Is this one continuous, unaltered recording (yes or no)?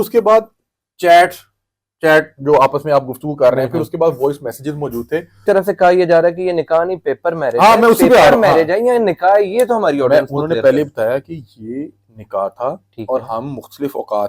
no